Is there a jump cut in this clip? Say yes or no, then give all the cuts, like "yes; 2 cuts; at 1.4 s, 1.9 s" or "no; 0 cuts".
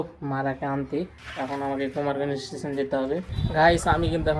yes; 1 cut; at 3.3 s